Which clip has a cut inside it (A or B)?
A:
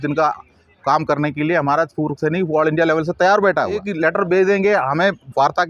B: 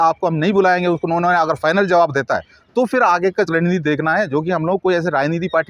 A